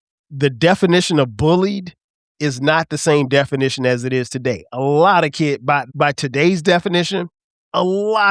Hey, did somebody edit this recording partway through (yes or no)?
yes